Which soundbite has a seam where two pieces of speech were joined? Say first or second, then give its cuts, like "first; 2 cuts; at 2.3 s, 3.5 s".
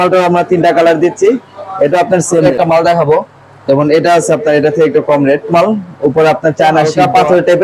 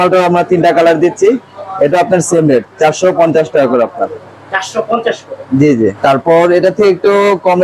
first; 3 cuts; at 2.4 s, 5.5 s, 6.9 s